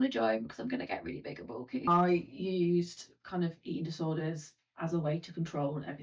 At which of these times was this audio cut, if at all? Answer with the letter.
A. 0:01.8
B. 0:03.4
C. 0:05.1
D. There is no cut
A